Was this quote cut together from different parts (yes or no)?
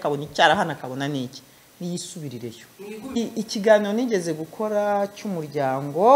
yes